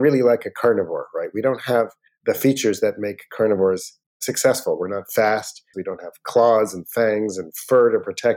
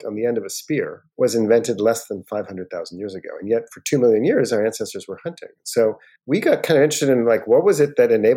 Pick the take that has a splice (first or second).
first